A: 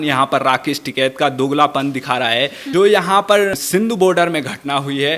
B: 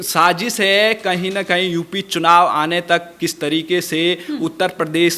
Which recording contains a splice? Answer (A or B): A